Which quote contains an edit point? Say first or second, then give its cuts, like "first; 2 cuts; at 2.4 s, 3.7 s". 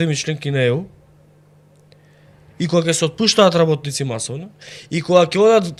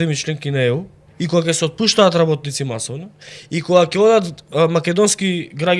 second; 1 cut; at 1.0 s